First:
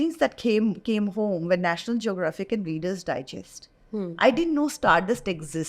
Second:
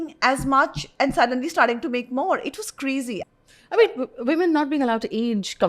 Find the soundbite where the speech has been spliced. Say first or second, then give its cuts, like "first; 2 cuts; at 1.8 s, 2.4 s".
second; 1 cut; at 3.2 s